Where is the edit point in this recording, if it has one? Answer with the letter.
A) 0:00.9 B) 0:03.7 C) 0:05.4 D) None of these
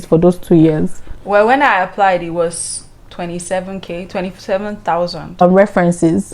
C